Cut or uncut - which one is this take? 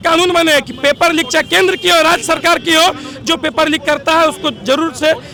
uncut